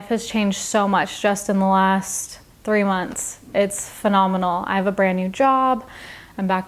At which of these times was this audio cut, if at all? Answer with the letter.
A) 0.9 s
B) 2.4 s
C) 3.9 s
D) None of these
D